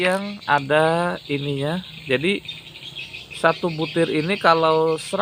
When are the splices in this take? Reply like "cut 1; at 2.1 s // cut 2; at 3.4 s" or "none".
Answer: none

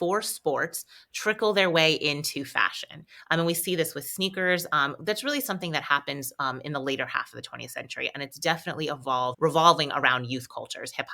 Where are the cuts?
cut 1; at 9.3 s

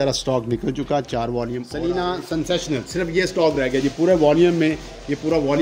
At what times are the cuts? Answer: cut 1; at 1.7 s

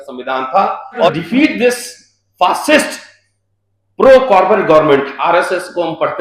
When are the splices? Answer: cut 1; at 1.2 s

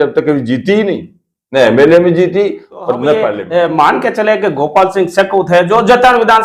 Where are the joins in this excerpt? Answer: cut 1; at 3.4 s

